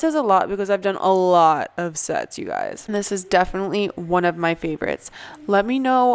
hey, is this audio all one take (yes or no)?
yes